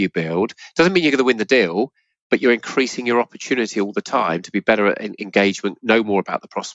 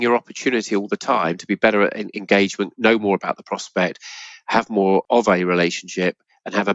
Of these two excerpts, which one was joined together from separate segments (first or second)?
second